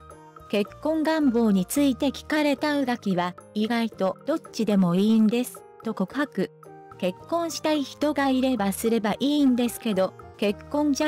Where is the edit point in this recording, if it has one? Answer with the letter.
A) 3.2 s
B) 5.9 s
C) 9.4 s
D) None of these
A